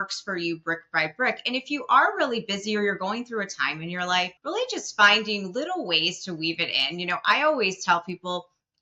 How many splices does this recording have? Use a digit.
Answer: 1